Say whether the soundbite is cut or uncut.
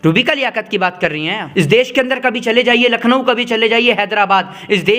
cut